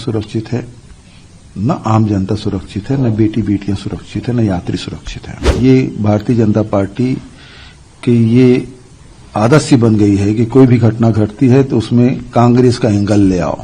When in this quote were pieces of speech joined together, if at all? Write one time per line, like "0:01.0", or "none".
0:05.5